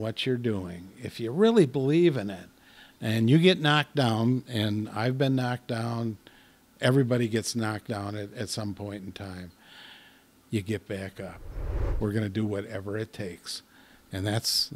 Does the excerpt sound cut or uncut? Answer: cut